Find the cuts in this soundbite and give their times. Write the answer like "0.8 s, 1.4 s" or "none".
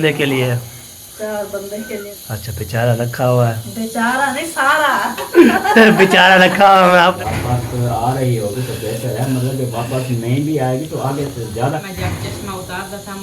2.1 s, 7.2 s, 11.8 s